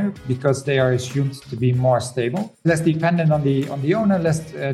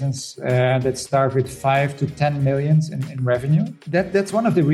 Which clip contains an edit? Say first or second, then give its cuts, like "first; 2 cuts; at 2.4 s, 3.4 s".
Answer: second; 1 cut; at 3.8 s